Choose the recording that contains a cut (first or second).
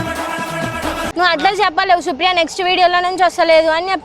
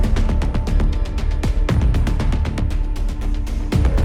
first